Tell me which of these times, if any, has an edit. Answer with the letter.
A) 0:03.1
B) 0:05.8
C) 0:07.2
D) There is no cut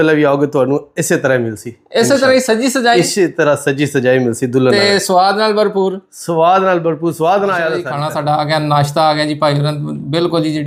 D